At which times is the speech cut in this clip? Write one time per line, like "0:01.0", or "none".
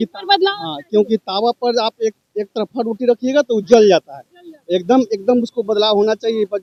none